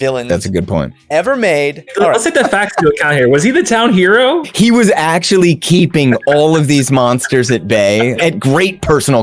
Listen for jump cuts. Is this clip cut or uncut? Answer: cut